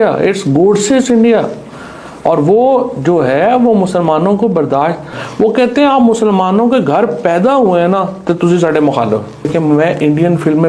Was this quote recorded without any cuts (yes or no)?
no